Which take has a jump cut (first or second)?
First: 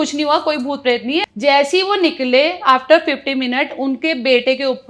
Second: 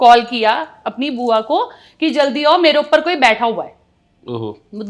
first